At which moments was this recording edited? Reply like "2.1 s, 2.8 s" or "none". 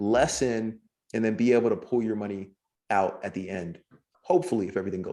4.1 s

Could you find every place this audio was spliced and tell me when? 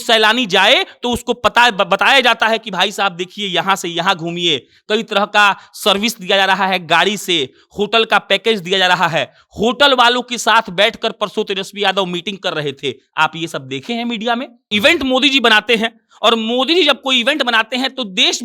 14.6 s

